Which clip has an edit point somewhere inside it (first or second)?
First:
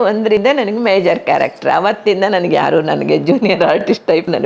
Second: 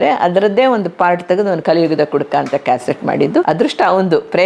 second